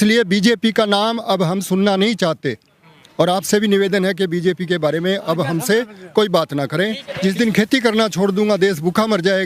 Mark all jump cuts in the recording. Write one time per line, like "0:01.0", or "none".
0:07.0